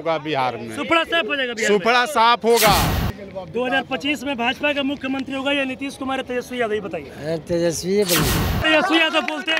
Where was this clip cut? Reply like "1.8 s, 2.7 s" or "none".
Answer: 3.1 s, 8.6 s